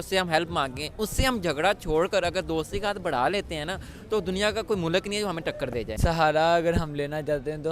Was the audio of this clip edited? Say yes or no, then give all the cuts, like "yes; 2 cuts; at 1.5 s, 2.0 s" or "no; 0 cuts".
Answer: yes; 1 cut; at 6.0 s